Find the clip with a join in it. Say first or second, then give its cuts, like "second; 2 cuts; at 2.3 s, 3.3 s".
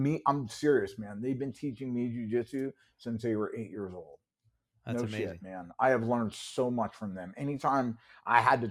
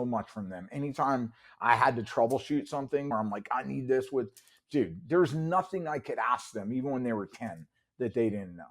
second; 1 cut; at 3.1 s